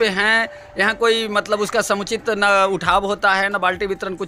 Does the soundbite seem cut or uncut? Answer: uncut